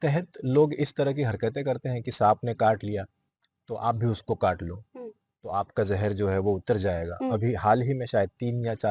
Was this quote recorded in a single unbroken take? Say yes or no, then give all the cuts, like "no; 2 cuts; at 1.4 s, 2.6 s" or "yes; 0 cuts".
yes; 0 cuts